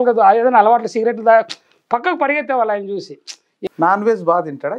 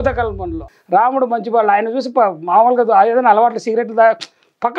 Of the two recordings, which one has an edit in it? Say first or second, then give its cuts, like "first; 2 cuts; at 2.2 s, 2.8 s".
first; 1 cut; at 3.5 s